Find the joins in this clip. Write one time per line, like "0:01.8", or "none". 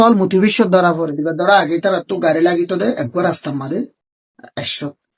0:01.3